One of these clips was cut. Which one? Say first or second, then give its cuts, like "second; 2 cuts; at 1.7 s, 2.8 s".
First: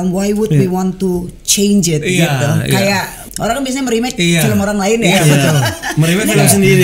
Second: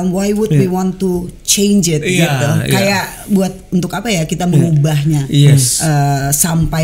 first; 1 cut; at 3.2 s